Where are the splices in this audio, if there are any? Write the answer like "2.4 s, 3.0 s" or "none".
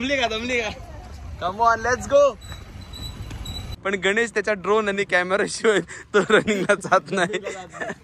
3.7 s